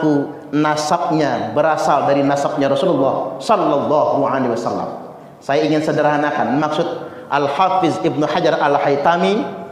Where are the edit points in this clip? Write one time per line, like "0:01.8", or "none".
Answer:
none